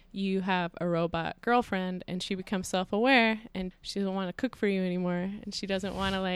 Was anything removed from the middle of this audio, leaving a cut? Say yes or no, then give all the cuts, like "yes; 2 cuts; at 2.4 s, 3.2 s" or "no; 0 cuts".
yes; 1 cut; at 3.6 s